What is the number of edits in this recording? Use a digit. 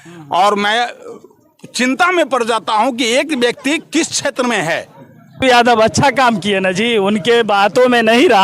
1